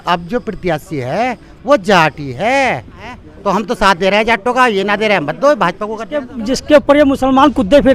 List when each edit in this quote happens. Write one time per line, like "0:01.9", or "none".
0:03.3
0:06.4